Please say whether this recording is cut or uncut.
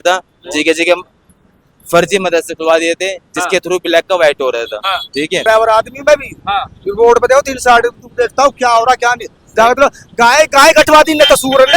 cut